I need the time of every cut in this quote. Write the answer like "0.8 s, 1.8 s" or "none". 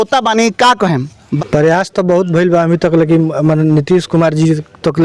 1.3 s